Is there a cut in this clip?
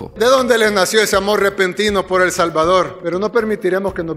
no; 0 cuts

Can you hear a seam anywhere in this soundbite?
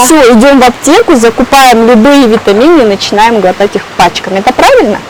no; 0 cuts

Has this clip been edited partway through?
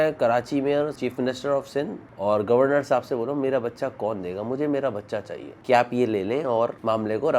yes; 2 cuts; at 1.0 s, 5.6 s

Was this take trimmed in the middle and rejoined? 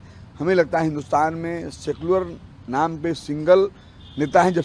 no; 0 cuts

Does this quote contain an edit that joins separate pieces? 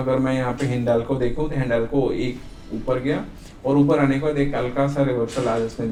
no; 0 cuts

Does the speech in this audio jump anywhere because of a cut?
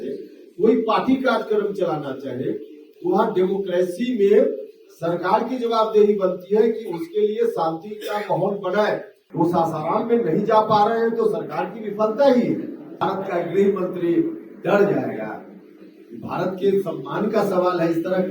yes; 2 cuts; at 9.2 s, 12.8 s

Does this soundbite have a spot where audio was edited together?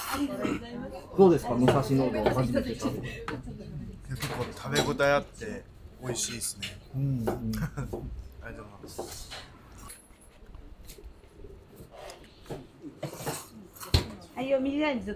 no; 0 cuts

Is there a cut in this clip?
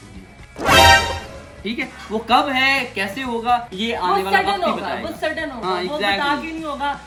no; 0 cuts

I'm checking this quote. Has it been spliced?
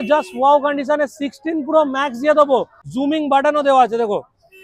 yes; 1 cut; at 2.8 s

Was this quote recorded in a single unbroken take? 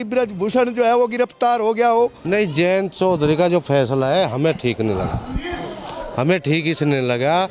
no; 1 cut; at 2.2 s

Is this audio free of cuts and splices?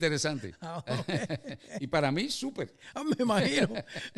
yes; 0 cuts

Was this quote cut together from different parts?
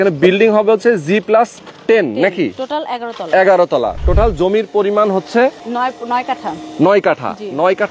yes; 2 cuts; at 1.7 s, 5.6 s

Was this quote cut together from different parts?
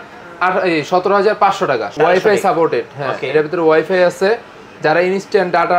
yes; 1 cut; at 1.9 s

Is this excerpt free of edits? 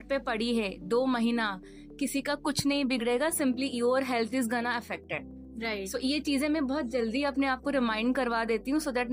yes; 0 cuts

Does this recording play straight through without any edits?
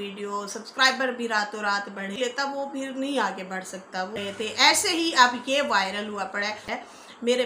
no; 3 cuts; at 2.2 s, 4.2 s, 6.7 s

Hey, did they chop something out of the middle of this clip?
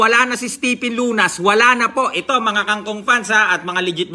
no; 0 cuts

